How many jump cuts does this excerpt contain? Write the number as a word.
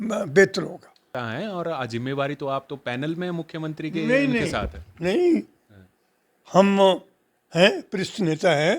one